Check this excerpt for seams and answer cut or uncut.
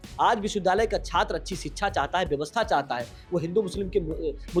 uncut